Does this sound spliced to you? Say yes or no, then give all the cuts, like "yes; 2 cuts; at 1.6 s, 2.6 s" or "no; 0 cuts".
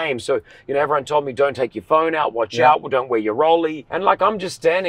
yes; 1 cut; at 3.9 s